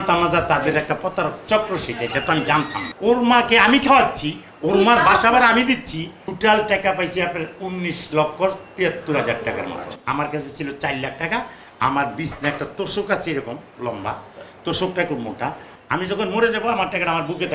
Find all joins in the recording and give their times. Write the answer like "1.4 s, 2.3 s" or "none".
2.8 s, 6.2 s, 10.0 s, 15.7 s